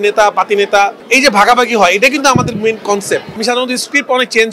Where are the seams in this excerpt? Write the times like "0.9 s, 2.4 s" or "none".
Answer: 1.0 s, 3.4 s